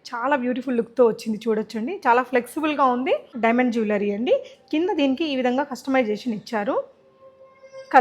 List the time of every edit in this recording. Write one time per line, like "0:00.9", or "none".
0:03.3

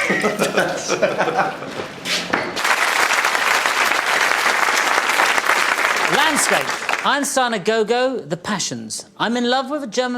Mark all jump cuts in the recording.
0:02.6

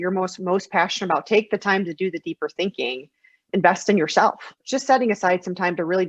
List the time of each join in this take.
0:03.4
0:04.6

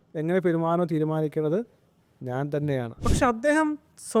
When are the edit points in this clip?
0:03.0

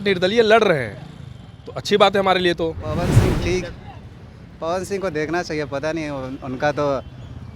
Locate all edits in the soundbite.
0:03.0

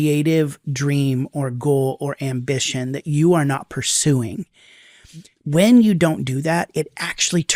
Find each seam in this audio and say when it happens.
none

